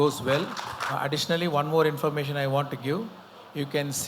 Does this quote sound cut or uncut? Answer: cut